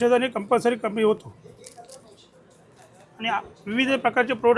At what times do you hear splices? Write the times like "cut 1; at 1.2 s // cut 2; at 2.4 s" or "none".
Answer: none